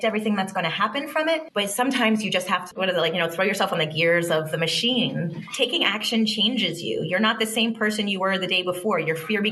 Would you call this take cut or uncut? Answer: cut